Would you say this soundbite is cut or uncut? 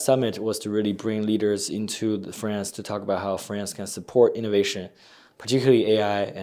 uncut